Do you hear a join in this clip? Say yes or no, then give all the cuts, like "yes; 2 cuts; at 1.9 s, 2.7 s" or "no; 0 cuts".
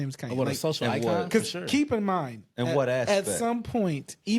no; 0 cuts